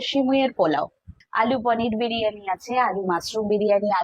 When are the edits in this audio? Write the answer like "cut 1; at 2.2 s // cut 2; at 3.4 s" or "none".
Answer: cut 1; at 1.2 s